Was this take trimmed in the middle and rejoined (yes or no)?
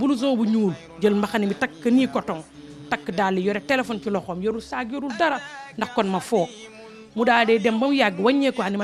no